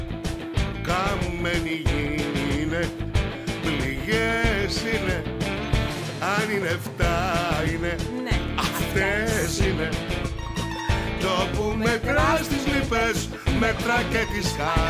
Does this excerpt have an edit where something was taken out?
no; 0 cuts

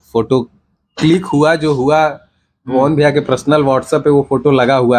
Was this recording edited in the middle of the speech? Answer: no; 0 cuts

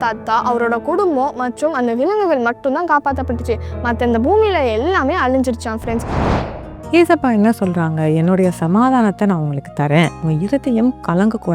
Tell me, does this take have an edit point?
yes; 1 cut; at 6.4 s

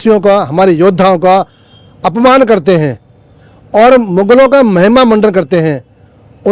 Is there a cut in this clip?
no; 0 cuts

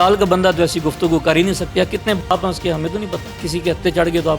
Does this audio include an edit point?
yes; 2 cuts; at 1.6 s, 3.4 s

